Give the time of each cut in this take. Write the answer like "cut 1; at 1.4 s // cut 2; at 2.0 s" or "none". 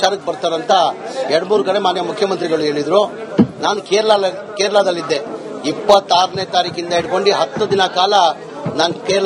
cut 1; at 5.3 s